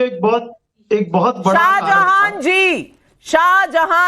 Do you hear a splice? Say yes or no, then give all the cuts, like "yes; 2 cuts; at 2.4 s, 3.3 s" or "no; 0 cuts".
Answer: no; 0 cuts